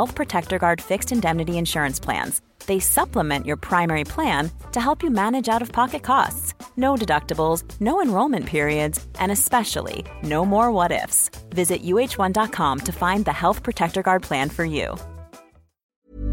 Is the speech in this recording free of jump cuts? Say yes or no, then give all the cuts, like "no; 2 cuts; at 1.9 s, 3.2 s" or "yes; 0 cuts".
yes; 0 cuts